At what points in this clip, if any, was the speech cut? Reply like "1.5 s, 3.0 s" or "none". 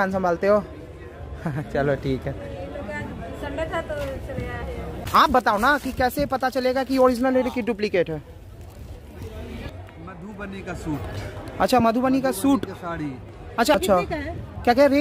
5.1 s, 9.7 s, 13.7 s